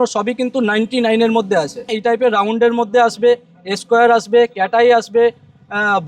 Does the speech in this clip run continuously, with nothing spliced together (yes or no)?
no